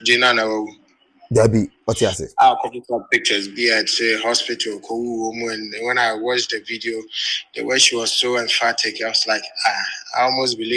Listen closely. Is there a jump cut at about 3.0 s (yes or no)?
no